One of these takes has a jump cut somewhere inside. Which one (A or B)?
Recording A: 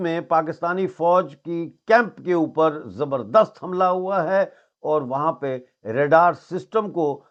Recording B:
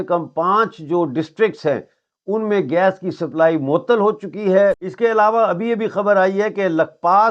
B